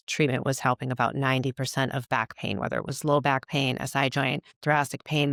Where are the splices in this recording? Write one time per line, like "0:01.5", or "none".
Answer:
none